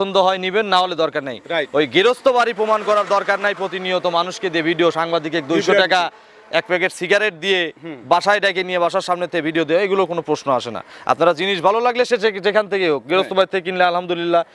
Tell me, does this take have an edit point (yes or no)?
no